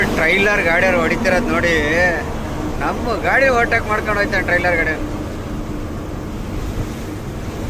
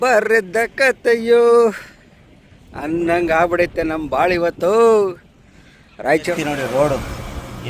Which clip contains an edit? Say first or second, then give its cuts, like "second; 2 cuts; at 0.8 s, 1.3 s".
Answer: second; 1 cut; at 6.3 s